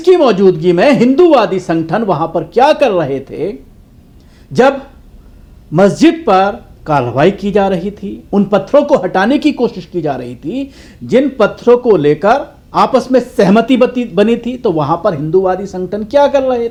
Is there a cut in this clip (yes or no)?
no